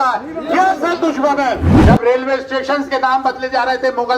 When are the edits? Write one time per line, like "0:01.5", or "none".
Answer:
0:01.7